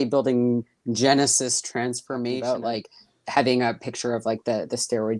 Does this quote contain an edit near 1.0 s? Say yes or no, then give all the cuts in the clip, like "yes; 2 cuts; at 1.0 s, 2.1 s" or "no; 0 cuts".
no; 1 cut; at 2.4 s